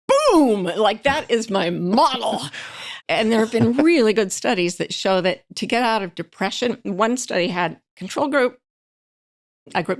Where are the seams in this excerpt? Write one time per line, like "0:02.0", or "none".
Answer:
none